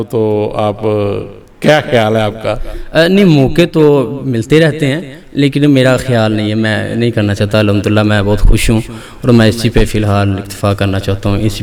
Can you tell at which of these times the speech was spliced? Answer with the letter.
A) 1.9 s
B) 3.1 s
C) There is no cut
C